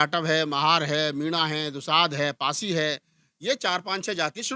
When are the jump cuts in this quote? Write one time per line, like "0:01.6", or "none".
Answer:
none